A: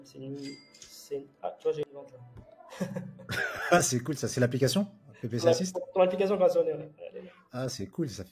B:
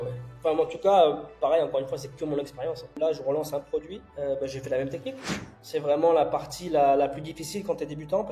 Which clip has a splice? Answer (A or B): B